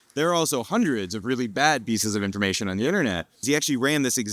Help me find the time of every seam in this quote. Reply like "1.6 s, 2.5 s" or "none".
3.4 s